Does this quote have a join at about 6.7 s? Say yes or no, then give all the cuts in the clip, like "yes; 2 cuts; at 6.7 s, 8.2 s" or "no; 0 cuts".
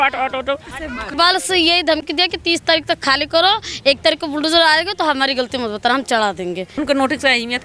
yes; 2 cuts; at 1.1 s, 6.7 s